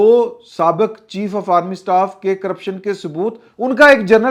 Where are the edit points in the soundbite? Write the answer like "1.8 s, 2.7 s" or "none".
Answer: none